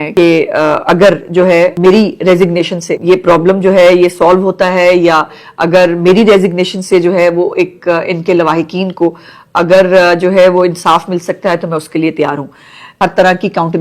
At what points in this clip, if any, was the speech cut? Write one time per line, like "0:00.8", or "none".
0:01.8
0:02.9
0:12.9